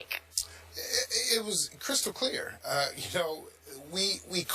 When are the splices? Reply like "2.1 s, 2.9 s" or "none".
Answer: 3.5 s